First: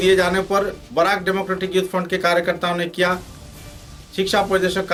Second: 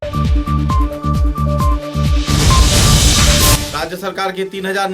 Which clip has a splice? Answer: second; 1 cut; at 3.6 s

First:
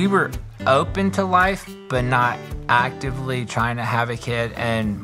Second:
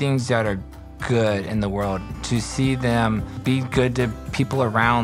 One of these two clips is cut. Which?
second; 1 cut; at 3.3 s

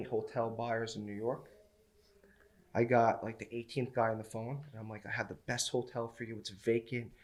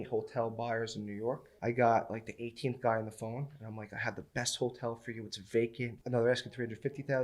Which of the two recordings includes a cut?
second; 2 cuts; at 1.5 s, 6.0 s

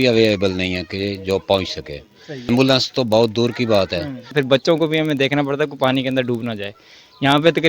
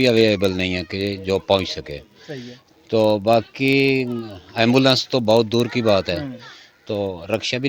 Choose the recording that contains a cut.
first; 2 cuts; at 2.5 s, 4.3 s

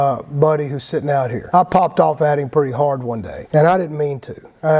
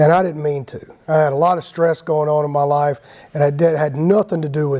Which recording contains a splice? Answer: first; 1 cut; at 1.4 s

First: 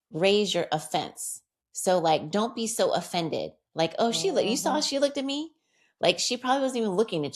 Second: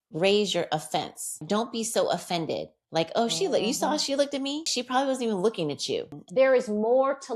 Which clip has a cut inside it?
second; 3 cuts; at 1.4 s, 4.7 s, 6.2 s

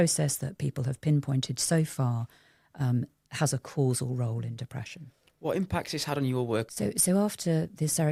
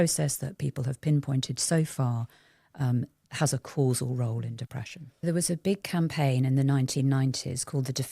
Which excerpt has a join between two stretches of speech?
second; 1 cut; at 5.2 s

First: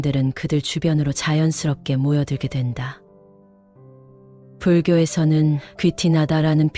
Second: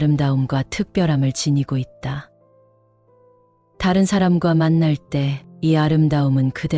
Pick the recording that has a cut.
second; 2 cuts; at 2.3 s, 3.7 s

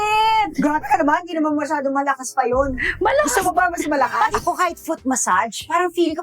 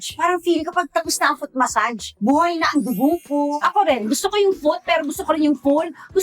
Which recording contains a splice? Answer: first; 1 cut; at 4.4 s

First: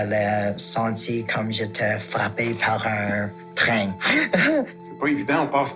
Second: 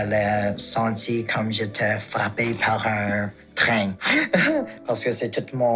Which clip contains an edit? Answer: first; 1 cut; at 4.8 s

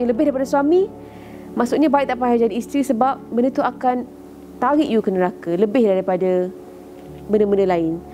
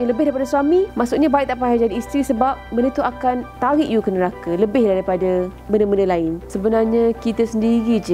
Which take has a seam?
second; 4 cuts; at 0.9 s, 3.5 s, 5.6 s, 6.5 s

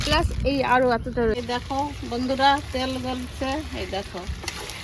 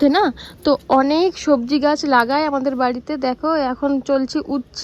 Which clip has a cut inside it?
first; 1 cut; at 1.3 s

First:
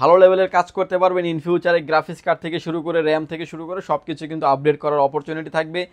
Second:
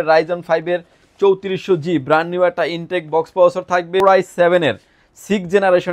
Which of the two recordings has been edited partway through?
second; 1 cut; at 4.0 s

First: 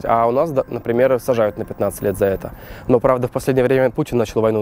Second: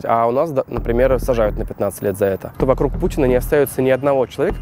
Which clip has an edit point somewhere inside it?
second; 1 cut; at 2.5 s

